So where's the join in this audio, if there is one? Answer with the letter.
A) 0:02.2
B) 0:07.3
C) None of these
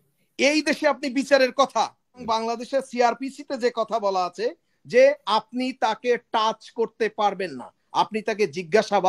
A